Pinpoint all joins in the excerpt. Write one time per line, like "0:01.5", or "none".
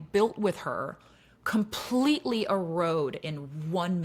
none